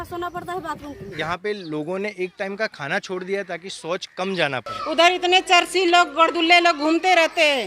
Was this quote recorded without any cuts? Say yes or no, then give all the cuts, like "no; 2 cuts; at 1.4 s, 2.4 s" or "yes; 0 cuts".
no; 2 cuts; at 1.0 s, 4.7 s